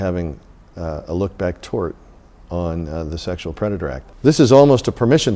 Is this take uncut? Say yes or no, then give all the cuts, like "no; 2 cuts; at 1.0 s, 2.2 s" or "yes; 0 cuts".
no; 1 cut; at 4.1 s